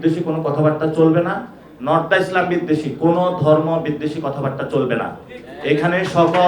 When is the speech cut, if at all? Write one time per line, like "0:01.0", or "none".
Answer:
none